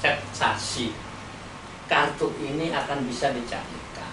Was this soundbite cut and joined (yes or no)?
no